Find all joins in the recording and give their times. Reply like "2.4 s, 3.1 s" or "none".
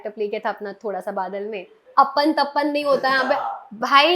1.8 s